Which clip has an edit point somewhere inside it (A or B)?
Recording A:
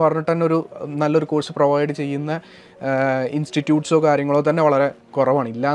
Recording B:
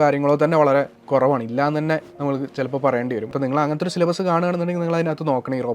B